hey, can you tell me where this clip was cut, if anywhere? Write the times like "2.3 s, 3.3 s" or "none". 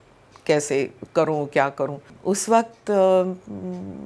2.1 s